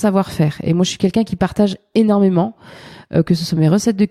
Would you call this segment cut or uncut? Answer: uncut